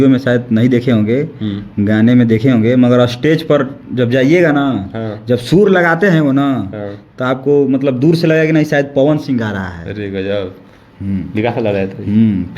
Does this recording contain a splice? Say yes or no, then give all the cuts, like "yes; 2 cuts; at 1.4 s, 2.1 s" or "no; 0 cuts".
no; 0 cuts